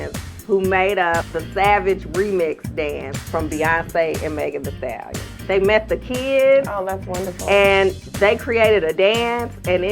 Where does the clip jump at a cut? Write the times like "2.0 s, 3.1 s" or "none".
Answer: 1.4 s, 5.3 s, 8.1 s